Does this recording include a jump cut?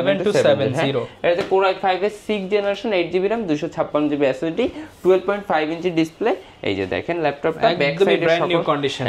no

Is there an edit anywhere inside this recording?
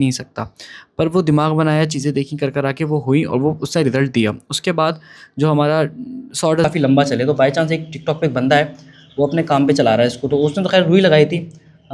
yes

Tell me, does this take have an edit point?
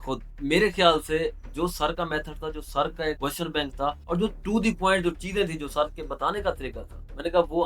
yes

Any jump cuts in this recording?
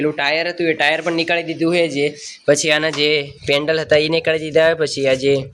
no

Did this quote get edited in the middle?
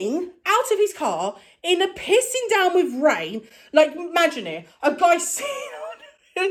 no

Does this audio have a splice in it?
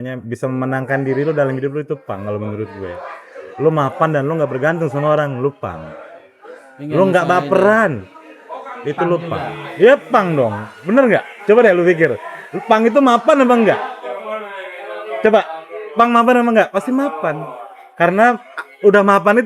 no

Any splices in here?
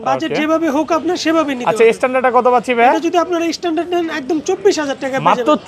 no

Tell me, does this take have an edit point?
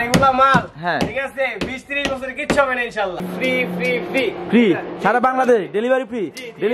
yes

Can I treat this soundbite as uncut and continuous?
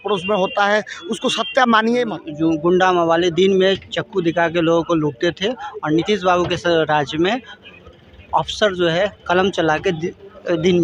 no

